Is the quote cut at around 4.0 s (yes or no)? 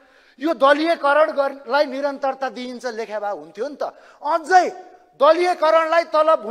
no